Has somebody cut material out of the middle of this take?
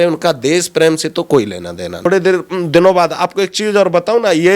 yes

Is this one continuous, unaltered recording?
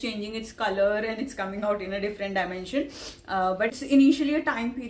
no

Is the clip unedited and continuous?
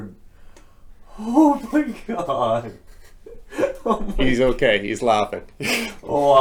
yes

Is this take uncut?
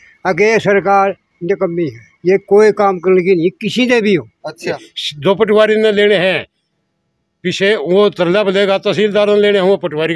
no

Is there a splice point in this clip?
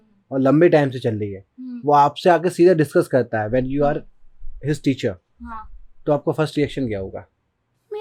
no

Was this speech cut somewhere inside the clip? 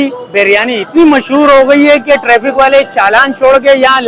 no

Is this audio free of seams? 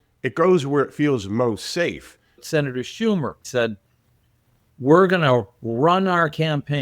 no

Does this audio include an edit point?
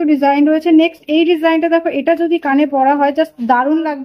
no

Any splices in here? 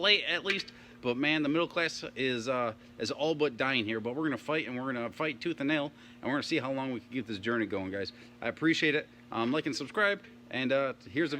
no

